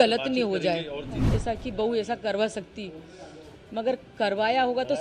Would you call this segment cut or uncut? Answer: cut